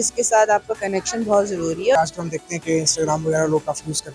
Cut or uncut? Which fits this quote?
cut